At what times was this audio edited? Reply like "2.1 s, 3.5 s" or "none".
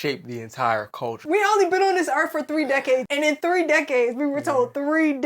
1.2 s, 3.1 s